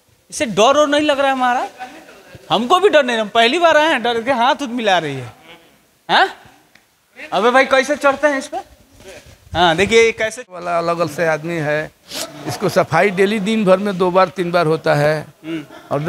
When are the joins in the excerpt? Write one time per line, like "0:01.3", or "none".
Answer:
0:10.3